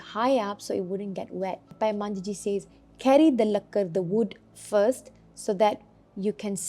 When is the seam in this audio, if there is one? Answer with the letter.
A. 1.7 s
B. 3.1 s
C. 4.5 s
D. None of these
A